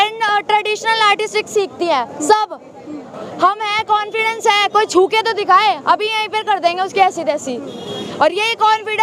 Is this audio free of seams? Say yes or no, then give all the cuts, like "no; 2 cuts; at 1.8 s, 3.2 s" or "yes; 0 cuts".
yes; 0 cuts